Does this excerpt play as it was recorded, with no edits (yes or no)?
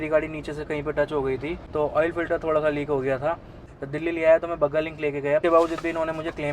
no